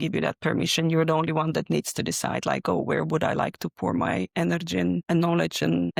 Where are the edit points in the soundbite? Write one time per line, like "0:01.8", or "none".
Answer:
none

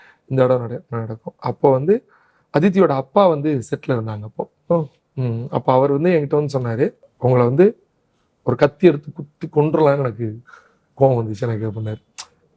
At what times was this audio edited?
0:07.0

